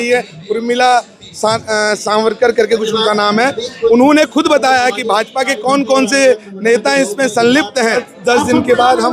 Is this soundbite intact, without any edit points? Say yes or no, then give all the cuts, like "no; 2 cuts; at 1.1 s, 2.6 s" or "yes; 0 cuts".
no; 1 cut; at 8.1 s